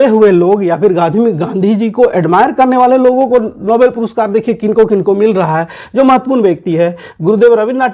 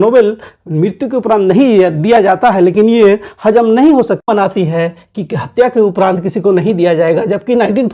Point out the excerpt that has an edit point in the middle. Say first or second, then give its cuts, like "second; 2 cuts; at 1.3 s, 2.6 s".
second; 1 cut; at 4.3 s